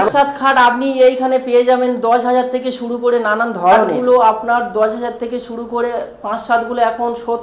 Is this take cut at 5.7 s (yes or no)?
no